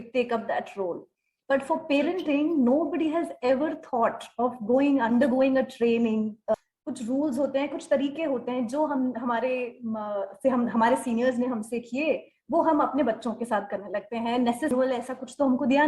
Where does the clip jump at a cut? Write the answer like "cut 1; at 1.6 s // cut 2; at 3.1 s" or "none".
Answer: cut 1; at 6.5 s // cut 2; at 14.7 s

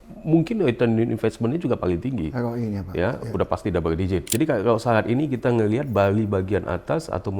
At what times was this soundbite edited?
cut 1; at 4.3 s

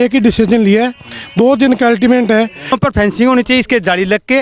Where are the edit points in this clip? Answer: cut 1; at 2.7 s

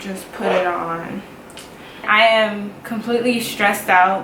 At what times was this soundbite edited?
cut 1; at 2.0 s

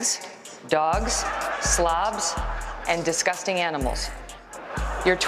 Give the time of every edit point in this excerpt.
none

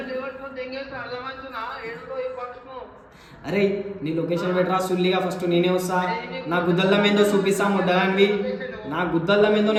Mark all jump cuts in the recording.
none

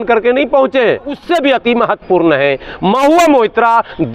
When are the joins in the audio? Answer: cut 1; at 1.2 s

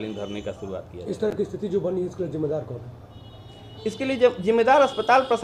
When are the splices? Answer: none

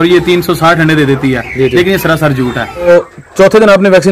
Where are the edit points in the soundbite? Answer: cut 1; at 2.9 s

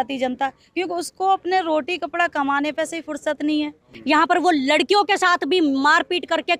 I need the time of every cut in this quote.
cut 1; at 3.9 s

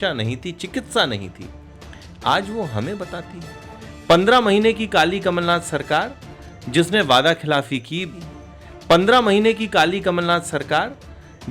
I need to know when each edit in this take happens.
cut 1; at 8.2 s

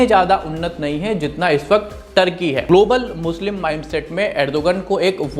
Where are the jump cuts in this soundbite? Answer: cut 1; at 2.7 s

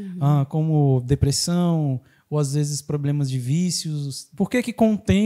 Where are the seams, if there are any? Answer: cut 1; at 4.2 s

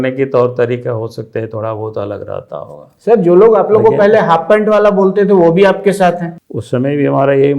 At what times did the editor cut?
cut 1; at 6.3 s

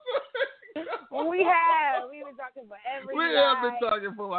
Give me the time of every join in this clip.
none

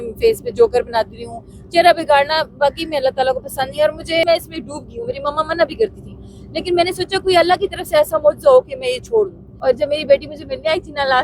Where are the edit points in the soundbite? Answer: cut 1; at 4.2 s // cut 2; at 9.4 s

